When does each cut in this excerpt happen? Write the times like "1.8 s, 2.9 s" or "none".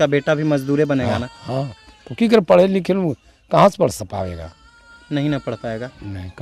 none